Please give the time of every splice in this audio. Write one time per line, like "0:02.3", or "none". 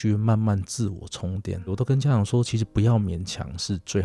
0:01.6